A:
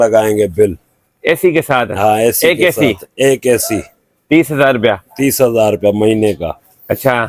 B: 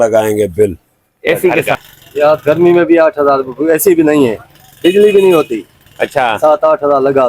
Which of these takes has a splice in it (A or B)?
B